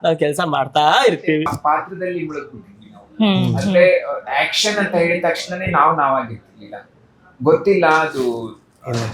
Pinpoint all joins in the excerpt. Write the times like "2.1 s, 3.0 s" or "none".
1.5 s

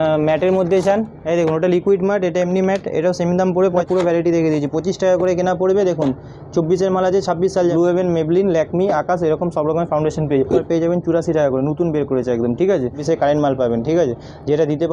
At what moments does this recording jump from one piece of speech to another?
3.8 s, 7.7 s, 10.7 s, 13.0 s

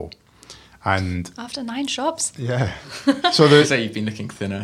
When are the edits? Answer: none

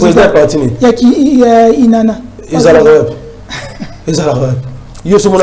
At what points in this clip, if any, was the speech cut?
none

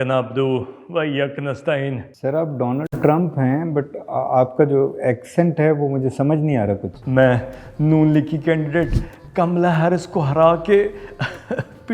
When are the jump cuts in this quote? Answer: 2.1 s, 6.9 s

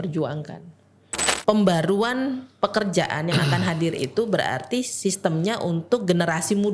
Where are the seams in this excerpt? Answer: 1.2 s

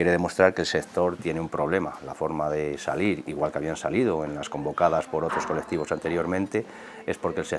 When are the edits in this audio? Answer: none

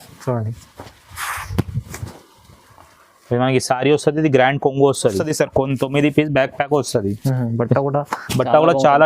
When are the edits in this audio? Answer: 5.2 s

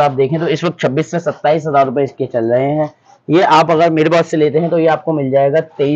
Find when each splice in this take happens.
none

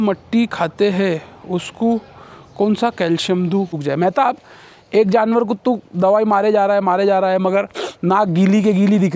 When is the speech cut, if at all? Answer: 3.8 s

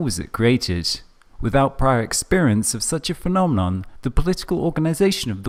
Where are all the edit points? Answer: none

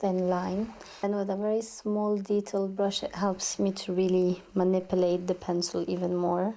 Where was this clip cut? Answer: 1.0 s

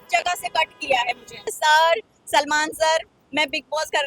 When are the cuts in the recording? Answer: 1.5 s

